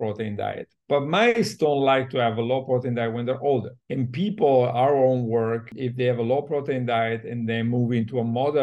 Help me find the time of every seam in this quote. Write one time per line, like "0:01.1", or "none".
0:03.8
0:05.7